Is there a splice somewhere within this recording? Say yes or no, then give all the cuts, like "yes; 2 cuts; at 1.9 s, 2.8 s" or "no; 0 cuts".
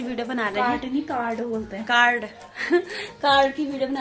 no; 0 cuts